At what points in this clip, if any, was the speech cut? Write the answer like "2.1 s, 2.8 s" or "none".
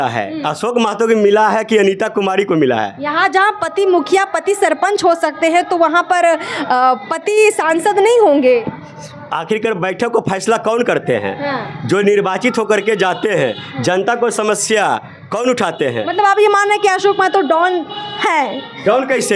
none

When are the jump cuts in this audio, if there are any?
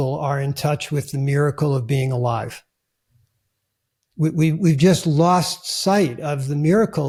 none

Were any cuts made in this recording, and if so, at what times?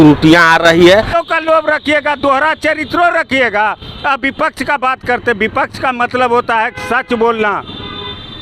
1.2 s

